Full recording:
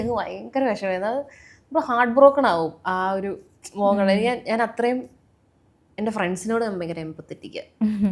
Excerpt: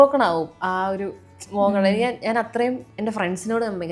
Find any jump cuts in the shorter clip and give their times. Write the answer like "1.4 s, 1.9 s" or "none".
2.9 s